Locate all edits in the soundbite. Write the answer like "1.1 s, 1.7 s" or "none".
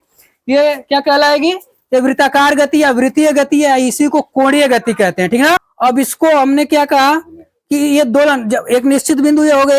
5.7 s